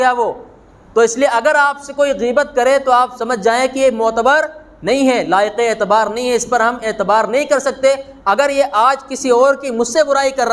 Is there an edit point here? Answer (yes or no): no